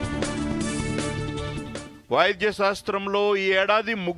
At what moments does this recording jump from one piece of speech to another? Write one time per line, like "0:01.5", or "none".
0:01.1